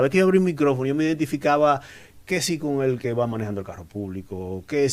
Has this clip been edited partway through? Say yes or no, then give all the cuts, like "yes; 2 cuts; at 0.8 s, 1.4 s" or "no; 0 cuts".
no; 0 cuts